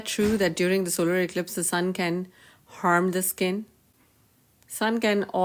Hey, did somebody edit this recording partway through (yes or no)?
no